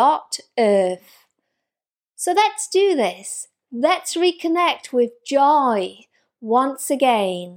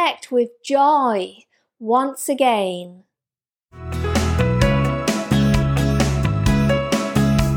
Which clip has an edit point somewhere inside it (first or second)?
second